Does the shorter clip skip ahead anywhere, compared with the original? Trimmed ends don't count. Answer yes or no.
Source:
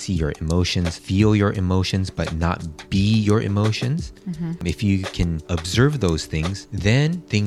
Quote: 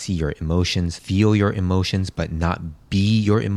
no